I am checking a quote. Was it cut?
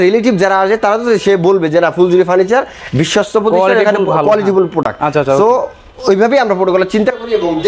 no; 0 cuts

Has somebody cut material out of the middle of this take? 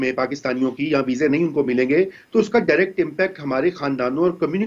no; 0 cuts

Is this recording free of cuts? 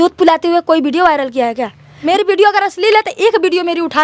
no; 1 cut; at 2.1 s

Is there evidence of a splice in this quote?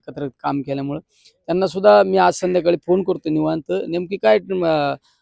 no; 0 cuts

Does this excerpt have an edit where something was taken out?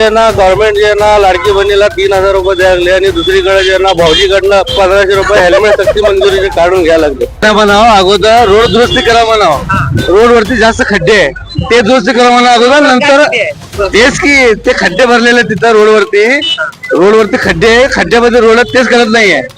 yes; 1 cut; at 7.4 s

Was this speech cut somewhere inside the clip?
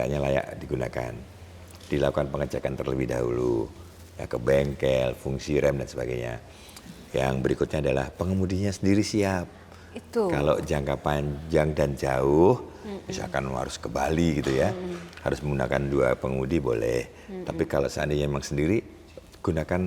no; 0 cuts

